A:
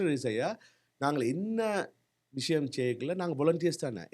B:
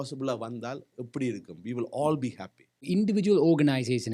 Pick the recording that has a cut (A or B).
B